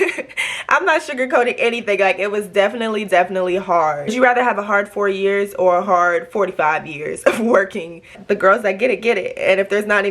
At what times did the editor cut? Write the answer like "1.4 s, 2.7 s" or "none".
4.0 s, 8.2 s